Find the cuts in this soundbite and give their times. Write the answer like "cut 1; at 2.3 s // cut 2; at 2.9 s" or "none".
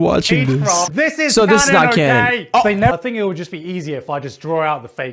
cut 1; at 0.9 s // cut 2; at 2.9 s